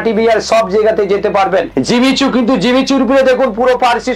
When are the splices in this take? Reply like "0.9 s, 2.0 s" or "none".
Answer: 1.7 s